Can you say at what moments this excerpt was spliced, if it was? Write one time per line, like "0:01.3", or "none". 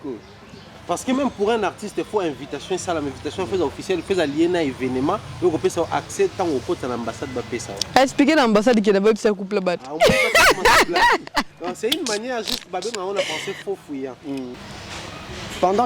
0:14.5